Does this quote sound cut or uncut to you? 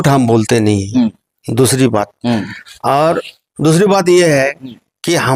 uncut